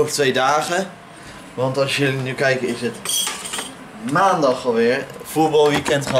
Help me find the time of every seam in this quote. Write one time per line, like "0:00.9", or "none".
none